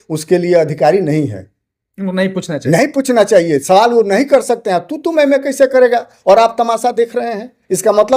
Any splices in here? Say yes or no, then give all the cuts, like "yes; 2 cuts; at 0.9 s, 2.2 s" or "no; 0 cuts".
no; 0 cuts